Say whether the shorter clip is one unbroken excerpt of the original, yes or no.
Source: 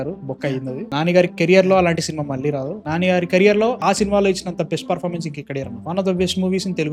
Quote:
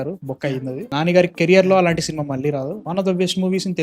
no